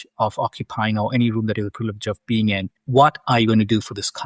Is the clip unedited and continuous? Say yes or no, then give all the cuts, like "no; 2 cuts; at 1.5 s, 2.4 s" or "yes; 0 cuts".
no; 1 cut; at 2.7 s